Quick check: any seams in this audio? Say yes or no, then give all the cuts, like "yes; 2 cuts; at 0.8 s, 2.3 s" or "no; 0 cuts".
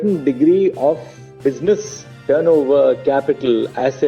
no; 0 cuts